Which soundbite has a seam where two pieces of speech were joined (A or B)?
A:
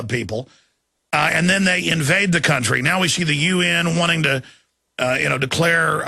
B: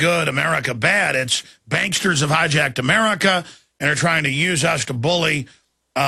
B